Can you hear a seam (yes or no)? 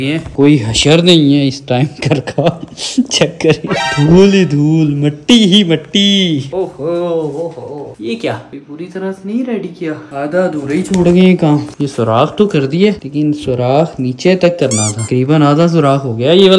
no